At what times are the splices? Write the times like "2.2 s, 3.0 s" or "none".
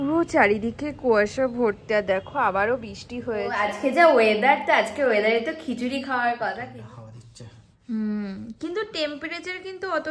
3.6 s, 6.7 s